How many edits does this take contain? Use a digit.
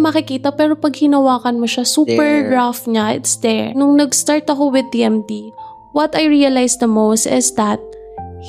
1